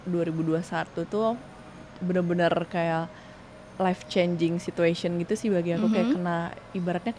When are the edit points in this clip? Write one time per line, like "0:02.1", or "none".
none